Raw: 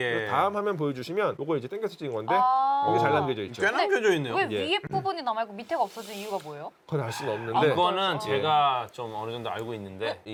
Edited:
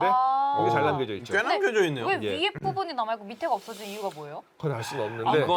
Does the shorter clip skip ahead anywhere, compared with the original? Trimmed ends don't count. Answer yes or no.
no